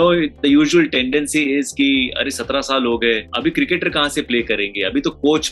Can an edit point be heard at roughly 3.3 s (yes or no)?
yes